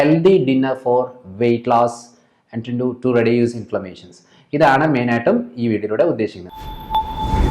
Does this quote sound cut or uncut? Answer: cut